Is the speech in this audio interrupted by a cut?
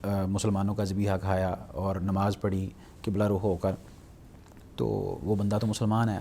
no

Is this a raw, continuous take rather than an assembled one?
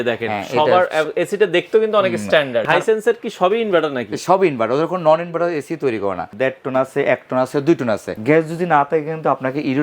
no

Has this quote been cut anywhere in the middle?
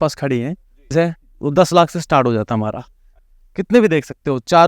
yes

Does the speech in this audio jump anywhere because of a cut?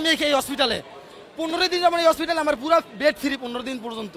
no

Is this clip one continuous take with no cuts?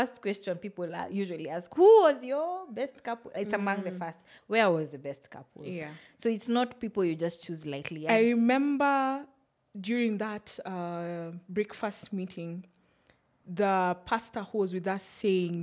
no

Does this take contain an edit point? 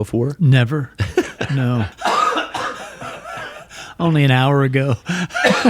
yes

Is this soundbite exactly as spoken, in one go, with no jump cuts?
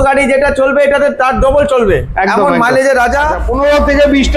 no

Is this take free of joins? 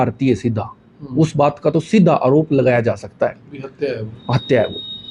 yes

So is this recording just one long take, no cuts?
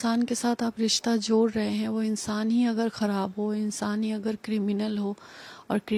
yes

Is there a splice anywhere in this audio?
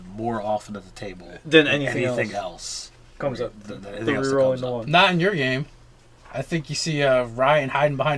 no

